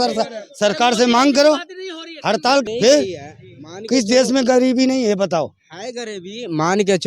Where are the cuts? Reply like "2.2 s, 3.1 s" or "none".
2.6 s